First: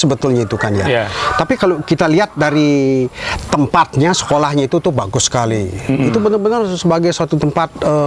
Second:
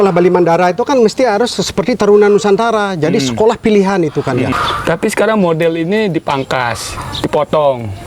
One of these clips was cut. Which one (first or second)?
second